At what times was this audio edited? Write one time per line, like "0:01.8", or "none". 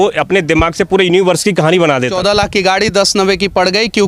0:02.1